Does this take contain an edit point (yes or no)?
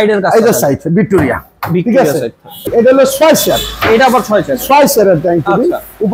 yes